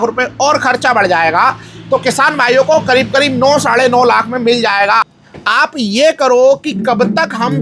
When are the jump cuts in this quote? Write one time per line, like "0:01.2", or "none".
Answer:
0:05.0